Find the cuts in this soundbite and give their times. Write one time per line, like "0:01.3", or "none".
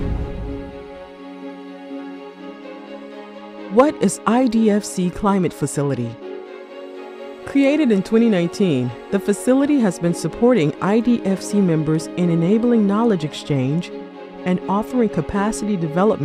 none